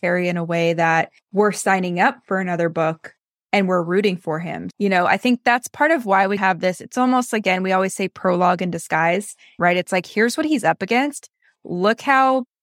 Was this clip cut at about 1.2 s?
yes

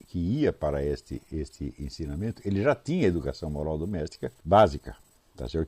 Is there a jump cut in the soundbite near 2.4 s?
no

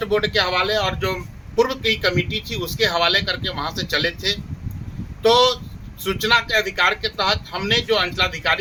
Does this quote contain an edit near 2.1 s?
no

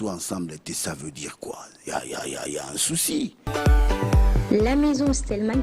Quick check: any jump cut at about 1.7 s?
no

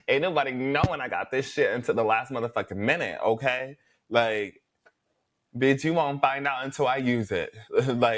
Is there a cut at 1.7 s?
no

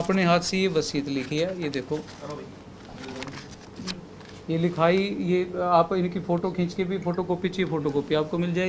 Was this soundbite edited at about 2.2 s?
no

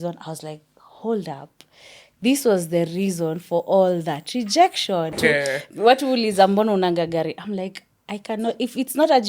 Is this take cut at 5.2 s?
yes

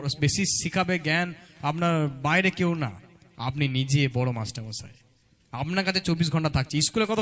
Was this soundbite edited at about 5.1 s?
no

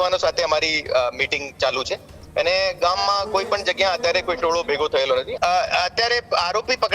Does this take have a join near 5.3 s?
yes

